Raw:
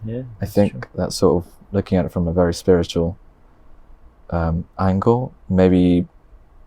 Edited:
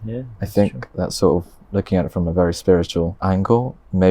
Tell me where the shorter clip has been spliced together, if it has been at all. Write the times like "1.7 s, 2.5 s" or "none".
3.2 s